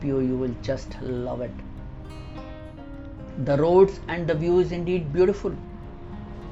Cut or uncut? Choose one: uncut